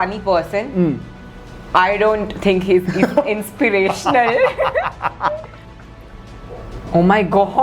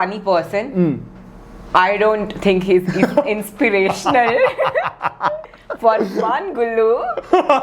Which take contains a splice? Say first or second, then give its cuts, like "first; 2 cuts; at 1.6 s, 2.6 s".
first; 1 cut; at 5.6 s